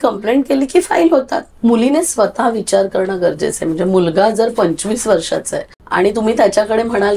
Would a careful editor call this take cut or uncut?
cut